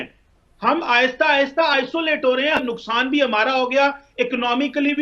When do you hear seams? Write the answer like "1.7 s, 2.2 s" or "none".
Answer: 2.6 s